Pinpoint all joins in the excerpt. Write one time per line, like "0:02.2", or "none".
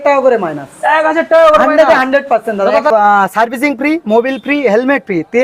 0:02.9